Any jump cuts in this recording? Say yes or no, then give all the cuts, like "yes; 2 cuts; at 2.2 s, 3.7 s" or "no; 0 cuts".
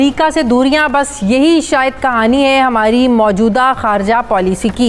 no; 0 cuts